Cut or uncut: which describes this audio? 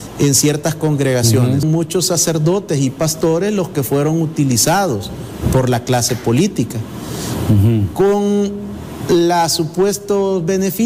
cut